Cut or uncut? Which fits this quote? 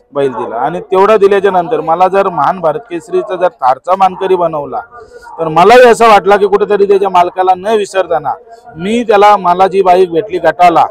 uncut